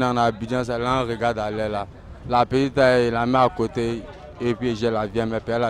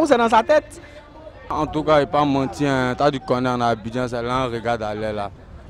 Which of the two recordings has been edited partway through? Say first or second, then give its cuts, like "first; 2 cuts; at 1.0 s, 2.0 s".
second; 1 cut; at 1.5 s